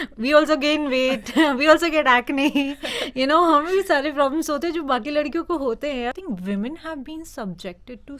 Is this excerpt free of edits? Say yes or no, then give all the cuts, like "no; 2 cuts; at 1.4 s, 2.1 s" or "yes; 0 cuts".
no; 1 cut; at 6.1 s